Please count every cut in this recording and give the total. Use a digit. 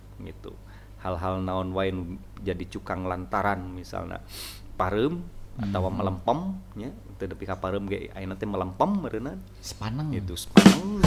0